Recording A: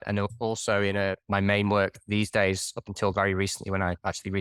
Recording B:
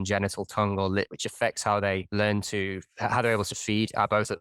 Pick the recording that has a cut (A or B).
B